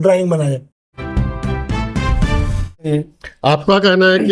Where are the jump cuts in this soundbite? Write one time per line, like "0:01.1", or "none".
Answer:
0:00.9
0:02.9